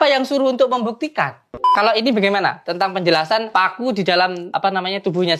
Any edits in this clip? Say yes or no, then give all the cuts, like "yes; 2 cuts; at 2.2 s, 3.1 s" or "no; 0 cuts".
yes; 3 cuts; at 1.7 s, 3.5 s, 4.5 s